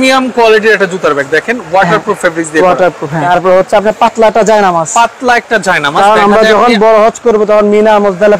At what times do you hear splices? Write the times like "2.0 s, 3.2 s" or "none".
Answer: 3.2 s